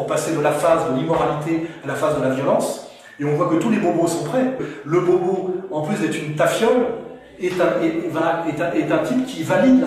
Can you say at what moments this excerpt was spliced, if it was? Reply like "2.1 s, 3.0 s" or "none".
4.7 s